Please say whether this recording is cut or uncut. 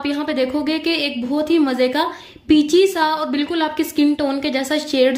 uncut